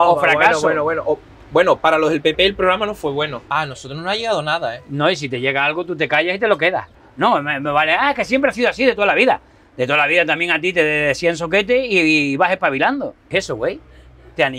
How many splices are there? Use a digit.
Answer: 3